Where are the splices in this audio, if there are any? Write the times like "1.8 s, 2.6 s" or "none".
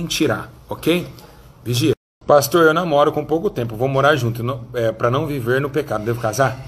2.1 s